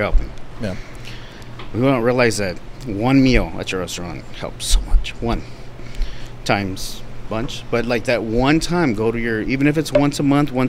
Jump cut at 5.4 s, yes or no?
no